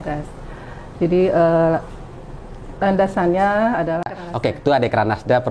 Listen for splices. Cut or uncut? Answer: cut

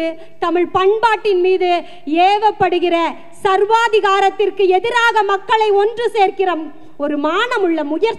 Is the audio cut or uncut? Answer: uncut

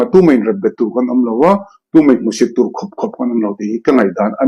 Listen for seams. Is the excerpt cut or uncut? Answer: uncut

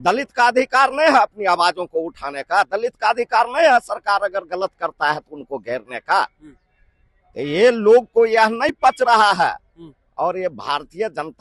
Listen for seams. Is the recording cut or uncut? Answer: uncut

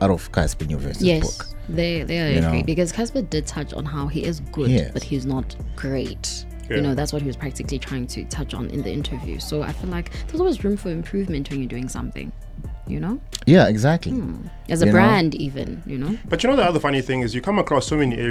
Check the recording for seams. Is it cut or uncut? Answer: uncut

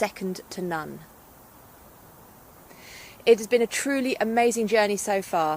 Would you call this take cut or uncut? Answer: cut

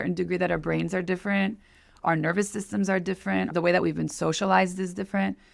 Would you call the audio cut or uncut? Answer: cut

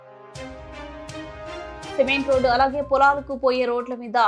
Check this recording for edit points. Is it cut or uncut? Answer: uncut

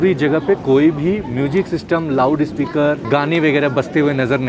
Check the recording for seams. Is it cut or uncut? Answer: cut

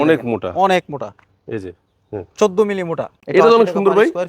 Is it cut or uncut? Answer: cut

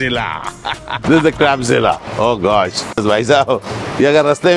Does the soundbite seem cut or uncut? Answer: cut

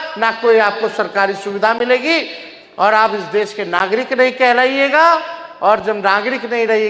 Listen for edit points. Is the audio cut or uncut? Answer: uncut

